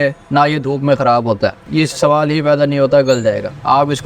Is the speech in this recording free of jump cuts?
no; 1 cut; at 1.6 s

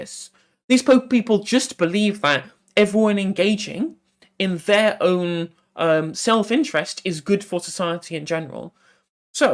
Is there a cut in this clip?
no; 0 cuts

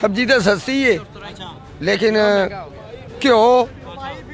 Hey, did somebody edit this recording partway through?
no; 0 cuts

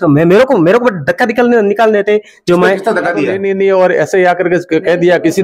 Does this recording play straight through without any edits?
no; 1 cut; at 3.3 s

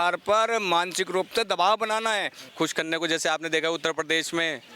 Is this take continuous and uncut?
no; 1 cut; at 2.5 s

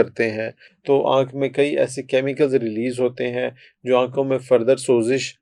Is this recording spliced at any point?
no; 0 cuts

